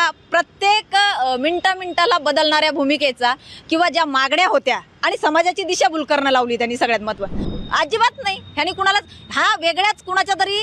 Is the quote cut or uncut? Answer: cut